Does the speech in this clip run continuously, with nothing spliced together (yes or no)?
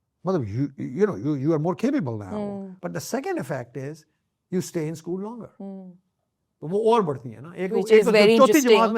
no